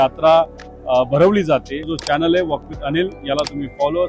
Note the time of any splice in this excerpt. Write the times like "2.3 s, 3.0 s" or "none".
1.8 s